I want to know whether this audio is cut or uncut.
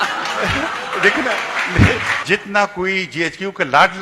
cut